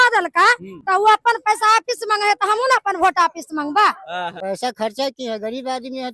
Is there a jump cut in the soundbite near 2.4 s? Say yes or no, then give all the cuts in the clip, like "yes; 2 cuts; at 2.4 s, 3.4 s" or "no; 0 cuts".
no; 1 cut; at 4.4 s